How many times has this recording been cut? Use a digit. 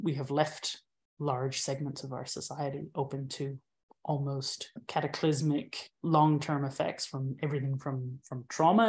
1